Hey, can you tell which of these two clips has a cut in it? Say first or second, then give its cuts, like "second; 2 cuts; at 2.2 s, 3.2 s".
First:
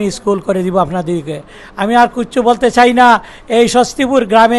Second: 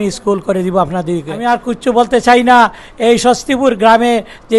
second; 1 cut; at 1.3 s